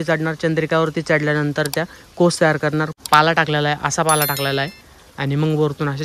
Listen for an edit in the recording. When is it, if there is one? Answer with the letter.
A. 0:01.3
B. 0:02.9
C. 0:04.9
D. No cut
B